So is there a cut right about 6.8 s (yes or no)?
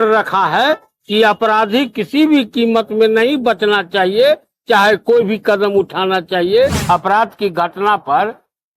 yes